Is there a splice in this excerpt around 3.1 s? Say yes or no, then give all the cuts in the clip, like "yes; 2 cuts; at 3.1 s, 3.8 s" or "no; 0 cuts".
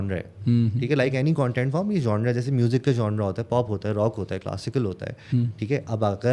no; 0 cuts